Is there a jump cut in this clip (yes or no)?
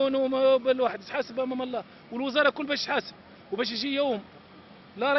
no